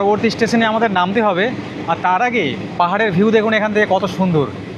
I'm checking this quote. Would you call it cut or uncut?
uncut